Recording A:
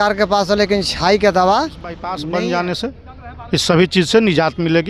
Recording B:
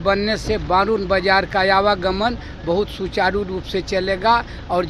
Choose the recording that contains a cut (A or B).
A